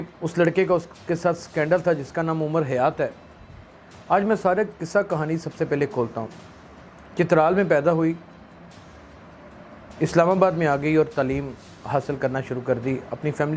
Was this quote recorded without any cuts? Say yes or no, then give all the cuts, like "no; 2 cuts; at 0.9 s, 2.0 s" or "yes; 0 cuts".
yes; 0 cuts